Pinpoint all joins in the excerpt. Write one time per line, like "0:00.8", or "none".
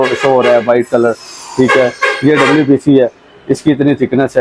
none